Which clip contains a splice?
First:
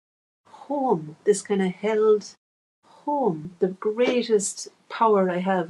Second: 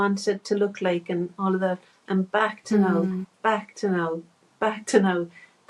first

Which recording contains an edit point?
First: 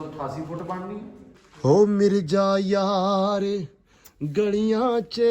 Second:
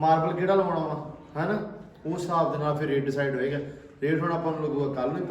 first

